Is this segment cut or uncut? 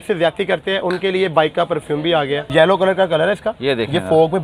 cut